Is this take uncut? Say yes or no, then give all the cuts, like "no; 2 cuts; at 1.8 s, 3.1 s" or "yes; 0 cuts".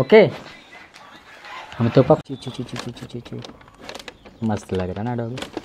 no; 1 cut; at 2.2 s